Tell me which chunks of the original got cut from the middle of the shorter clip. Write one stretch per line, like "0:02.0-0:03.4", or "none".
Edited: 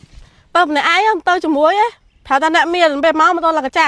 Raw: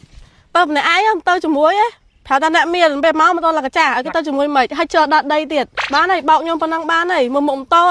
none